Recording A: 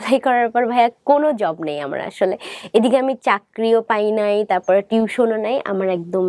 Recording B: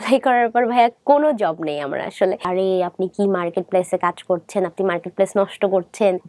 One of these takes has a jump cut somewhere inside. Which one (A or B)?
B